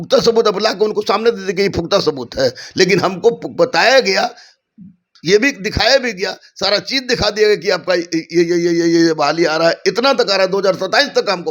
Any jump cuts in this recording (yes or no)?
no